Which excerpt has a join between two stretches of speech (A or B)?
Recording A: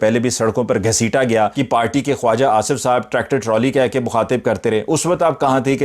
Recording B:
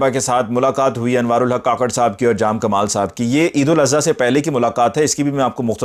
A